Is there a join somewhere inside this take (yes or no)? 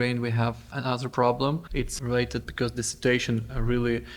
no